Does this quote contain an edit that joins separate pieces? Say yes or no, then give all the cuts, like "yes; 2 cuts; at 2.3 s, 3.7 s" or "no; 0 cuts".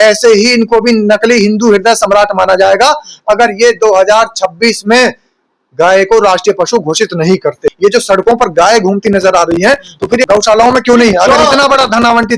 yes; 1 cut; at 7.7 s